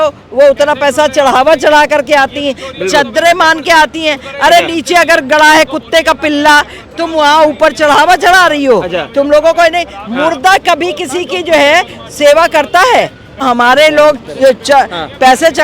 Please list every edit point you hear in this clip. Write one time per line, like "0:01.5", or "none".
0:13.4